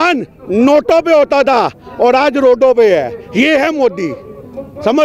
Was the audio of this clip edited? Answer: no; 0 cuts

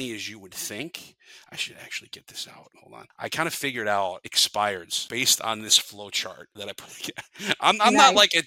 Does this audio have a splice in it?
yes; 4 cuts; at 2.8 s, 4.3 s, 5.0 s, 6.5 s

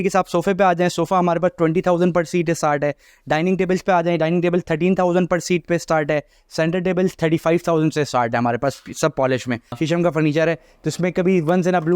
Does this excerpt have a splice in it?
yes; 1 cut; at 9.7 s

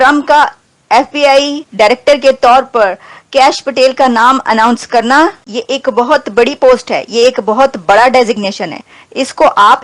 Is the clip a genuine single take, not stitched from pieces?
no; 1 cut; at 5.4 s

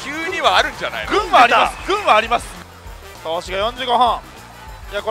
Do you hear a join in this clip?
yes; 1 cut; at 2.5 s

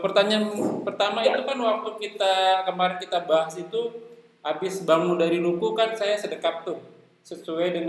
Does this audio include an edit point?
no; 0 cuts

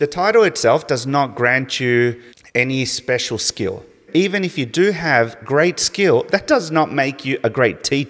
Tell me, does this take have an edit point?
yes; 2 cuts; at 2.3 s, 4.1 s

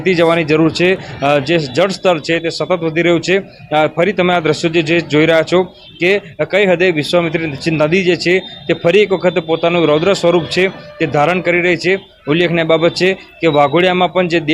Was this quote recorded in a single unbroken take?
yes; 0 cuts

